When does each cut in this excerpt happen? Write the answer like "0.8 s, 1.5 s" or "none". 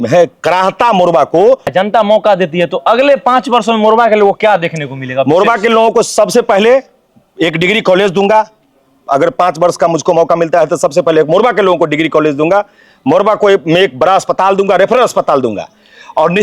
1.7 s